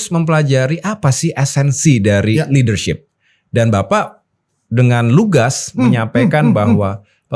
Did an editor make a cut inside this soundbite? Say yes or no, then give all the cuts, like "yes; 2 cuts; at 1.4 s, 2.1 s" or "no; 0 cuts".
no; 0 cuts